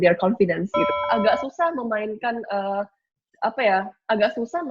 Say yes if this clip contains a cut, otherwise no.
yes